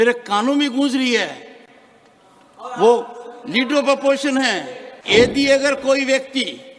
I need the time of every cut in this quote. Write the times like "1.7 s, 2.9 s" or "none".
5.0 s